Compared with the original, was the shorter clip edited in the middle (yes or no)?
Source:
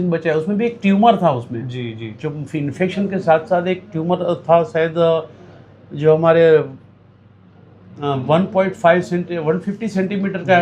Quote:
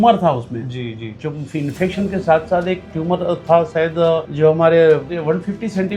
yes